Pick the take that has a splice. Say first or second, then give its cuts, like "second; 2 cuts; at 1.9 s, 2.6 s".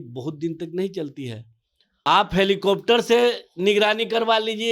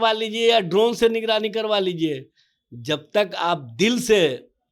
first; 1 cut; at 1.8 s